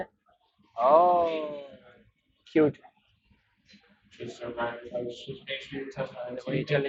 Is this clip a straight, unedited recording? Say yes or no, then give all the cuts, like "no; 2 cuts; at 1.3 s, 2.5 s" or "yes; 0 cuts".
yes; 0 cuts